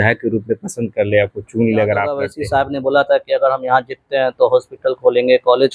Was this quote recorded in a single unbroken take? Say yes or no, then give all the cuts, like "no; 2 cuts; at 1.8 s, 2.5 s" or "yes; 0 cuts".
no; 1 cut; at 2.3 s